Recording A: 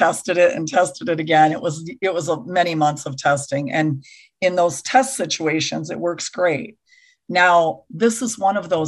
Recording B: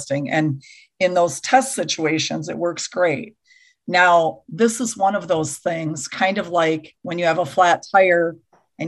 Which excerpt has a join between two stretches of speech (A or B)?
B